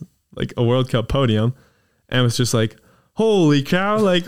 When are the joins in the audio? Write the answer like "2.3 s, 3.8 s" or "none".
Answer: none